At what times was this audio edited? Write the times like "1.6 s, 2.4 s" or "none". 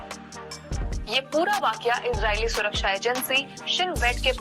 1.1 s